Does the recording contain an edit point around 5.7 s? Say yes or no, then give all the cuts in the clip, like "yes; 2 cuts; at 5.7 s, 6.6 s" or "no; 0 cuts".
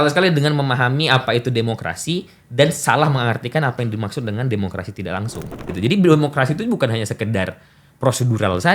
yes; 1 cut; at 5.7 s